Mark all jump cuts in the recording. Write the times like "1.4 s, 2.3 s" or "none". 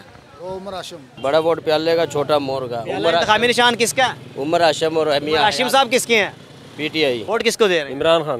1.1 s, 7.2 s